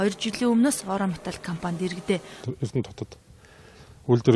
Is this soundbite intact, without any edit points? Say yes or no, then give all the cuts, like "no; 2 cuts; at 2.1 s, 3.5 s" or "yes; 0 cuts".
yes; 0 cuts